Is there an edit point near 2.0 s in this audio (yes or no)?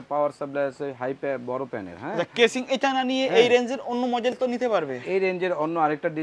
no